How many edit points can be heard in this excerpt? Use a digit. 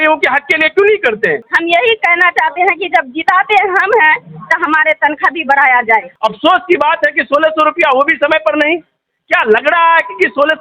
2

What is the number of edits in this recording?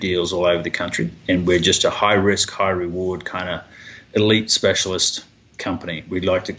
1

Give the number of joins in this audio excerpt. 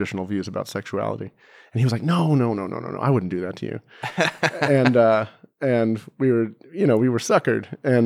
0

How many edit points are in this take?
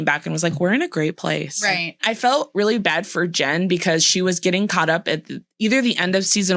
1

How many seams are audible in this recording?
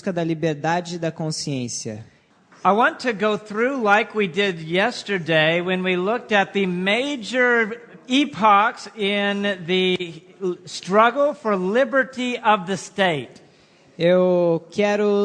1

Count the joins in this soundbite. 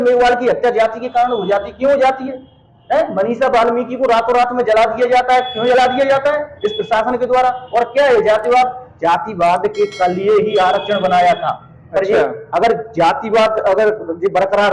0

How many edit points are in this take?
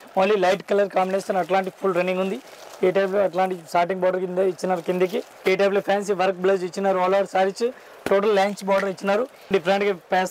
2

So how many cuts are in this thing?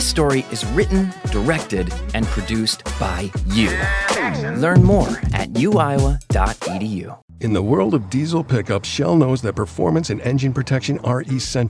1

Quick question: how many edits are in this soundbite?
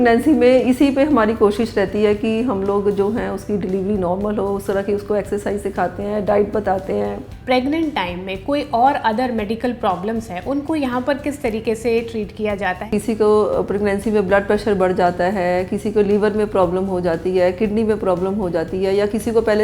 2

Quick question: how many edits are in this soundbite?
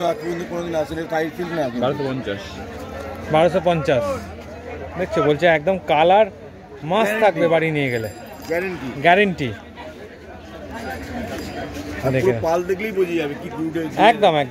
0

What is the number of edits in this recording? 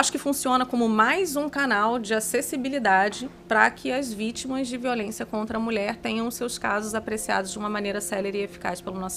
0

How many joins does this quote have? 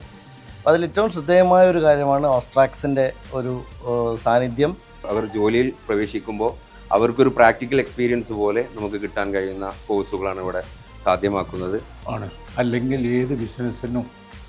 2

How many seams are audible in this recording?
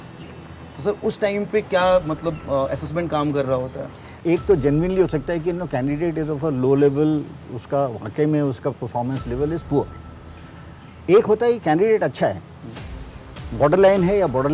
1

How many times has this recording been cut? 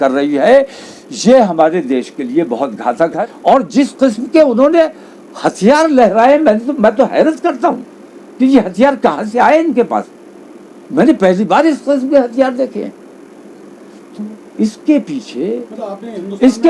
1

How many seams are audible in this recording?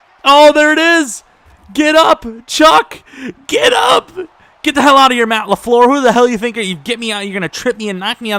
0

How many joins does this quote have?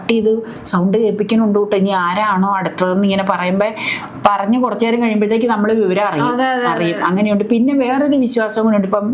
0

